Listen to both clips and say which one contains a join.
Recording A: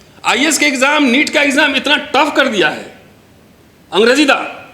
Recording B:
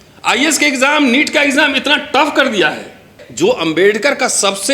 B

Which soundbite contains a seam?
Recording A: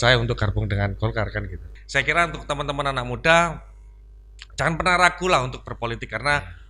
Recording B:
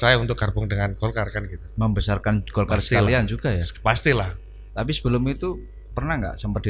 A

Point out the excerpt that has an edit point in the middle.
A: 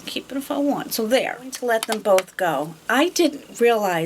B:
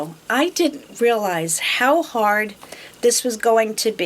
A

